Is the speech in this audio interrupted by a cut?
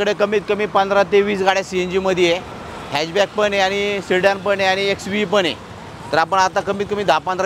no; 0 cuts

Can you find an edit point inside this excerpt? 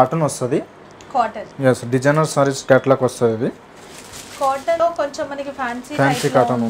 yes; 1 cut; at 4.8 s

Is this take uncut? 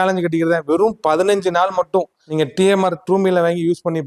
no; 1 cut; at 2.2 s

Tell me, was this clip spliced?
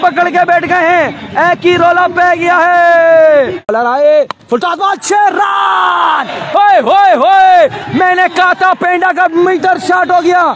yes; 1 cut; at 3.7 s

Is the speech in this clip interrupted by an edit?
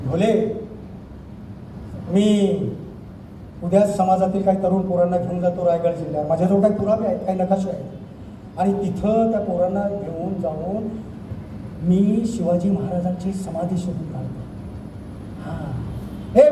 no; 0 cuts

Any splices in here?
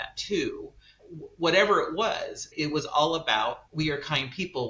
yes; 3 cuts; at 1.0 s, 2.5 s, 3.6 s

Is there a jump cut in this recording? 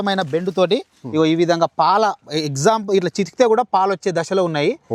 no; 0 cuts

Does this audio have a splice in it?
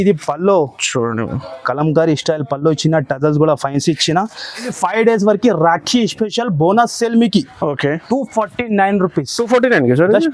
yes; 1 cut; at 4.7 s

